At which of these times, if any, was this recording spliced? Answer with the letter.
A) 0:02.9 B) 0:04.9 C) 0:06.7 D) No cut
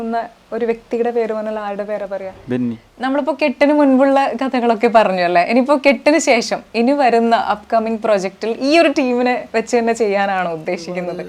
A